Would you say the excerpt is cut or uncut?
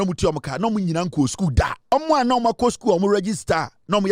cut